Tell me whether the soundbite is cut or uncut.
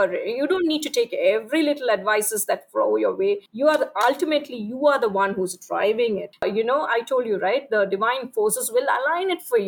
cut